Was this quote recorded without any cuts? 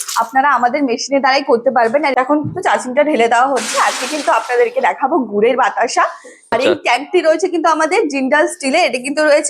no; 2 cuts; at 2.1 s, 6.5 s

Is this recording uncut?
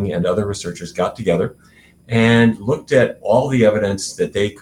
yes; 0 cuts

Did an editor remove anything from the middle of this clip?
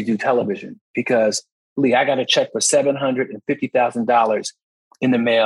no; 0 cuts

